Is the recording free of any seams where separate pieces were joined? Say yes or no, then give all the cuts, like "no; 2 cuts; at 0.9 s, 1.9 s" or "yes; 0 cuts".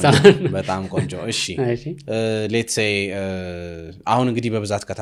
yes; 0 cuts